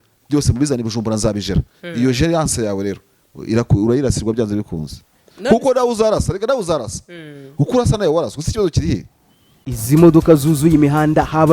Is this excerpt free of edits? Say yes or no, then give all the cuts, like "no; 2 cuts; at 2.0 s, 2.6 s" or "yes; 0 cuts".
no; 1 cut; at 9.7 s